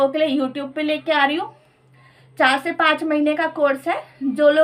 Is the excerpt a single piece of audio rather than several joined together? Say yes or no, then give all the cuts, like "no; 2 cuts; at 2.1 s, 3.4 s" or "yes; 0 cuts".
yes; 0 cuts